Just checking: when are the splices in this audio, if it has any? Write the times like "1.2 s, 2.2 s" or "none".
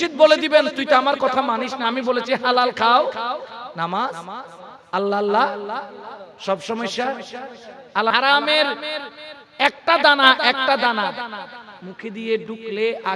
8.1 s